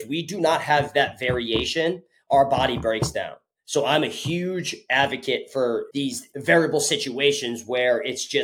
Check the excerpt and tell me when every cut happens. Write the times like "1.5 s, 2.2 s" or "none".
5.9 s